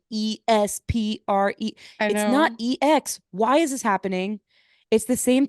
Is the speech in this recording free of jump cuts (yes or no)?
yes